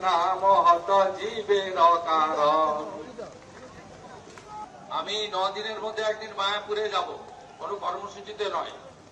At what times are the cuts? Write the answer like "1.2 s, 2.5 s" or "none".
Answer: 4.6 s